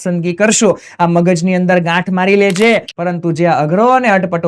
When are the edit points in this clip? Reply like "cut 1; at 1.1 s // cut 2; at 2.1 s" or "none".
cut 1; at 2.9 s